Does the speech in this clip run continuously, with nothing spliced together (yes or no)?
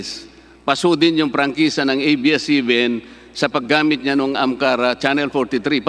yes